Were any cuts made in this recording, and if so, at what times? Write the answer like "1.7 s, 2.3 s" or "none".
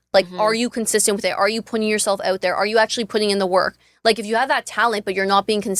none